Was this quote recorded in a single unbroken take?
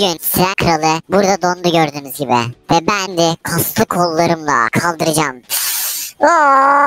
no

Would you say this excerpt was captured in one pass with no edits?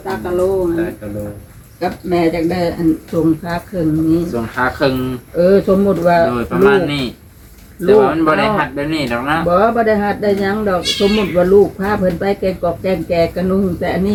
yes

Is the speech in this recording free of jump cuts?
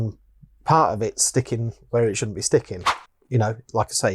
no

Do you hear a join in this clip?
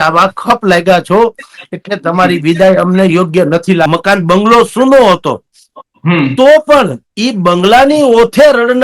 yes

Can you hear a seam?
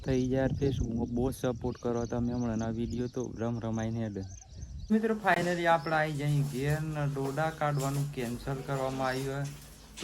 yes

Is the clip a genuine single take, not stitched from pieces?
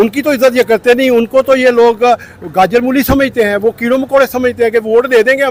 yes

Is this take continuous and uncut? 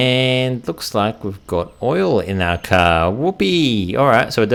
yes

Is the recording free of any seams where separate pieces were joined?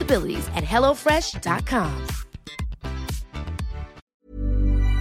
no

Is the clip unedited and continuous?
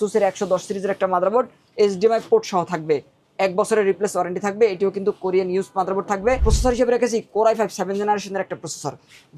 no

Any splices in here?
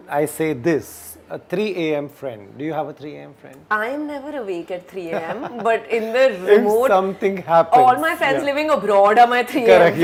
no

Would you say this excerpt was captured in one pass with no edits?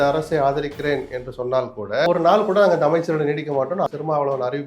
no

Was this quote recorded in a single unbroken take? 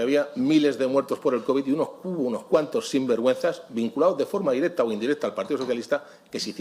yes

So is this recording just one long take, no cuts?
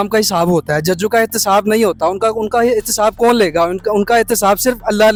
yes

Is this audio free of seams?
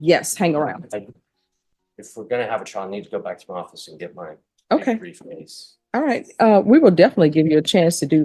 yes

